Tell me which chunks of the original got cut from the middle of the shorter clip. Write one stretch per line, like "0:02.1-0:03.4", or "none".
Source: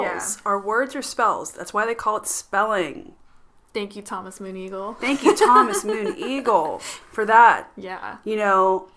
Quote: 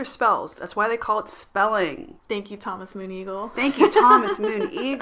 0:03.1-0:03.6